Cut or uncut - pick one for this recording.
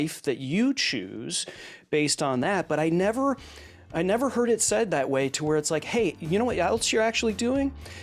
uncut